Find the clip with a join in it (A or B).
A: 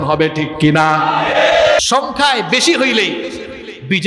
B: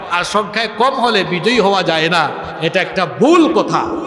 A